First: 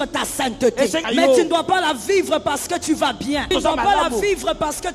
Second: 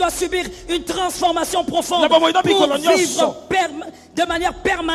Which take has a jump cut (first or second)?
first